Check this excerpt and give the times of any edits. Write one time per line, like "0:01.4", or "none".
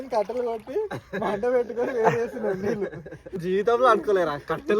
0:03.4